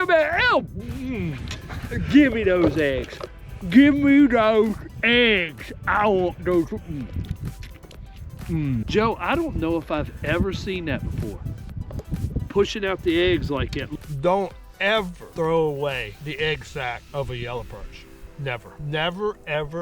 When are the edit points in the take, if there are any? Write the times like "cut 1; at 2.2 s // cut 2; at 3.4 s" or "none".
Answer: cut 1; at 8.9 s // cut 2; at 13.8 s // cut 3; at 15.2 s // cut 4; at 16.6 s // cut 5; at 18.7 s